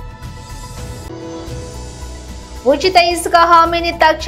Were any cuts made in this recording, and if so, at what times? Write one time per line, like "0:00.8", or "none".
0:01.1